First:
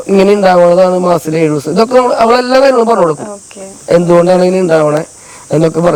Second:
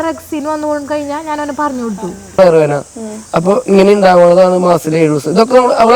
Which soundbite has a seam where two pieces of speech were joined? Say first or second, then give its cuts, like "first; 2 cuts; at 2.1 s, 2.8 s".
second; 1 cut; at 2.4 s